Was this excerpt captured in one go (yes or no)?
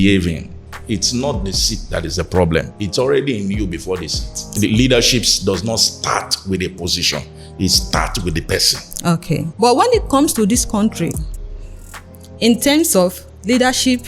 no